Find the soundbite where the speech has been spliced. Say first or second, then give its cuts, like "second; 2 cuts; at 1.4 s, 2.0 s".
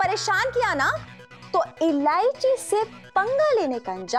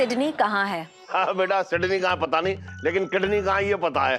second; 1 cut; at 0.9 s